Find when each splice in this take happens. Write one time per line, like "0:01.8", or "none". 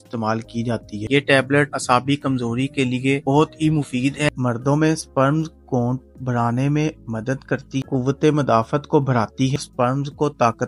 0:01.0
0:04.3
0:07.7
0:09.5

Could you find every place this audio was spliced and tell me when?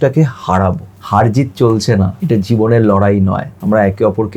0:00.9
0:02.2
0:03.5

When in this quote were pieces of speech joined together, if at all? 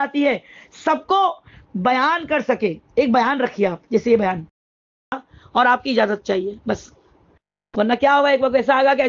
0:04.8

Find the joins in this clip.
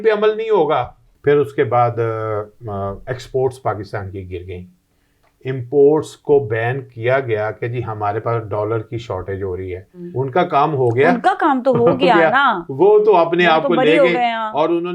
0:01.0
0:10.0

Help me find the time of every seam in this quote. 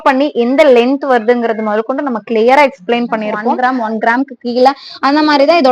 0:03.4

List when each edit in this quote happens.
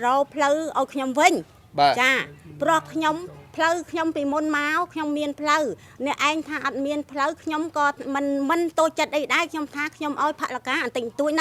none

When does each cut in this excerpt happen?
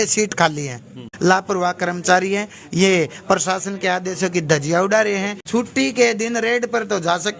0:01.1
0:05.4

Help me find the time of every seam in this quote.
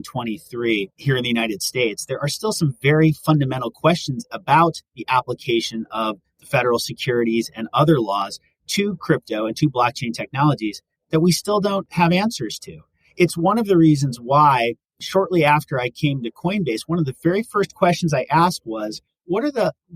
0:00.9
0:11.9

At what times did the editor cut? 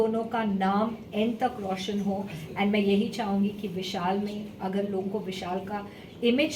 none

